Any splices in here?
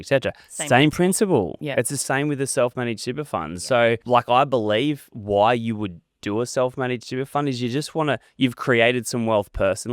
yes; 1 cut; at 4.0 s

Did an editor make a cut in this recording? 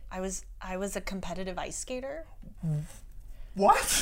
no; 0 cuts

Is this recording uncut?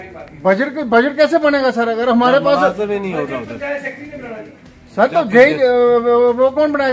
yes; 0 cuts

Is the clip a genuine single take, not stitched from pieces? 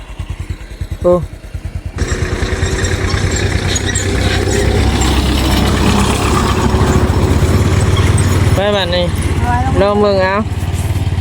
no; 1 cut; at 2.0 s

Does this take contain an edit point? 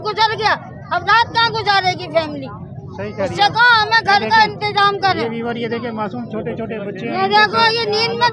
no; 0 cuts

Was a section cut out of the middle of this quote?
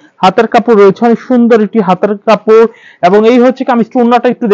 no; 0 cuts

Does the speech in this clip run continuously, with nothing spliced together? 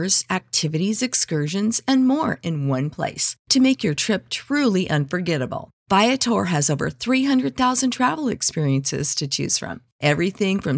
yes; 0 cuts

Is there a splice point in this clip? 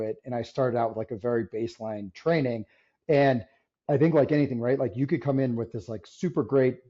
no; 0 cuts

